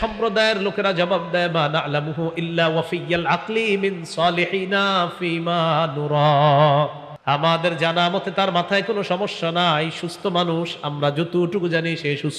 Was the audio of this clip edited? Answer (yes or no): yes